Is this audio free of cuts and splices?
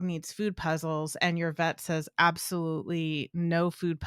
yes; 0 cuts

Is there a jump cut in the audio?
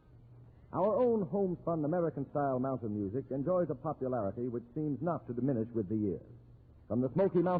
no; 0 cuts

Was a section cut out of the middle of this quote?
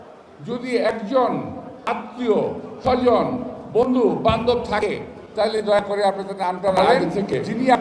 no; 0 cuts

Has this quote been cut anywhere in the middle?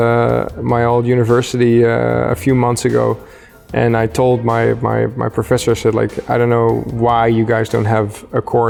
no; 0 cuts

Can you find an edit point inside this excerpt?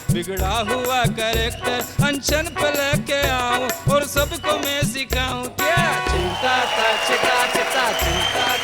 no; 0 cuts

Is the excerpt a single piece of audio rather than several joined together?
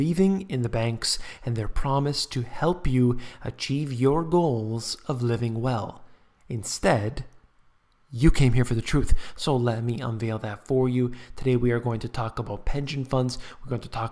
no; 1 cut; at 5.2 s

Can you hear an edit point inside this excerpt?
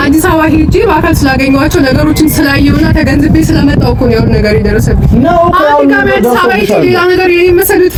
no; 0 cuts

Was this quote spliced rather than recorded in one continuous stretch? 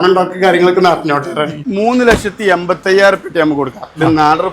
yes; 1 cut; at 1.6 s

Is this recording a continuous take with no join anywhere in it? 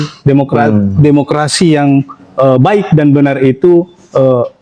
yes; 0 cuts

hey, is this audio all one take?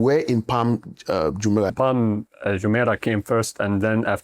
no; 1 cut; at 1.7 s

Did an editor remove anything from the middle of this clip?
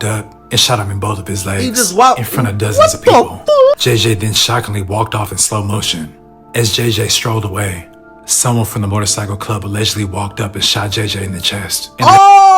yes; 1 cut; at 3.8 s

